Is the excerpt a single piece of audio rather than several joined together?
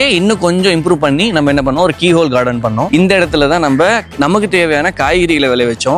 no; 1 cut; at 2.9 s

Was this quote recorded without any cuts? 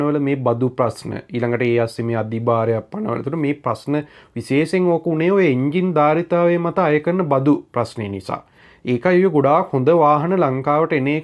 yes; 0 cuts

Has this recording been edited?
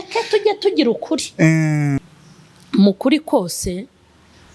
yes; 1 cut; at 2.0 s

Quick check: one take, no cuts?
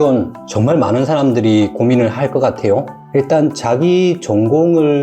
no; 1 cut; at 3.0 s

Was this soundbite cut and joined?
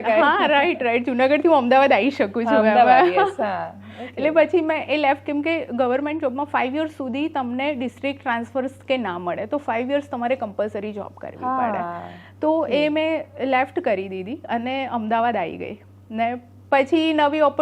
no; 0 cuts

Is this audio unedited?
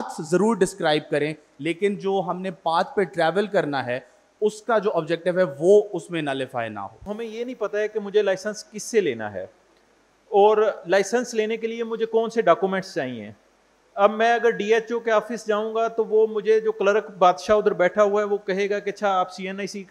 no; 1 cut; at 7.1 s

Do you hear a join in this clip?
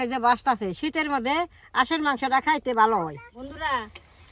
yes; 1 cut; at 3.3 s

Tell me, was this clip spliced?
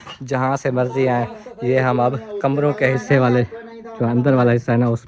no; 0 cuts

